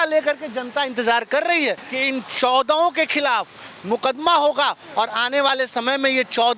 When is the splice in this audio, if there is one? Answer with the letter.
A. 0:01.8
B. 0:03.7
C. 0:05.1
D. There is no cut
A